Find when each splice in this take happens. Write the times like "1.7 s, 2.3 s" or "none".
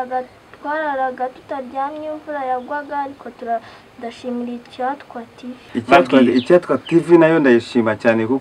5.7 s